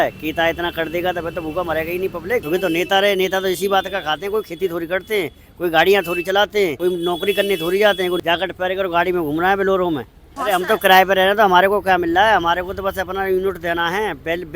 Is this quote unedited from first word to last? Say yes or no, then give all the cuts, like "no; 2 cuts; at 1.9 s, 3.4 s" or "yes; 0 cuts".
no; 4 cuts; at 2.4 s, 6.8 s, 8.2 s, 10.3 s